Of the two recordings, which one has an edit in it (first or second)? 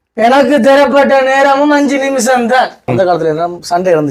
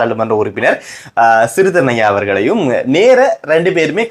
first